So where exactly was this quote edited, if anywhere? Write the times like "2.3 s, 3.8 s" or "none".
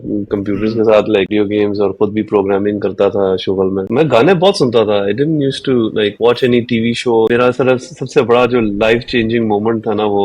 1.3 s, 3.8 s, 7.3 s